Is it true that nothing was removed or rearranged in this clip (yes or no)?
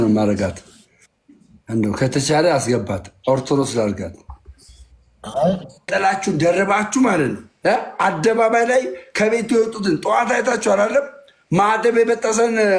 no